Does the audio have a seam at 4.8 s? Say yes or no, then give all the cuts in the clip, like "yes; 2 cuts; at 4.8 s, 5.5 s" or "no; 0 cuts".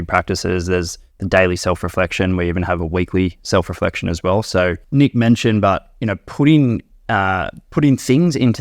yes; 1 cut; at 4.8 s